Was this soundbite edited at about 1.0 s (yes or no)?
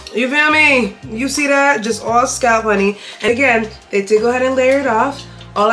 no